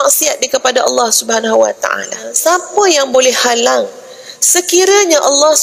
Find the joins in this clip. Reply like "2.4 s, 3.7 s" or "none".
2.4 s